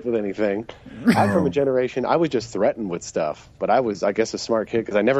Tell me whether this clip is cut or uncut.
uncut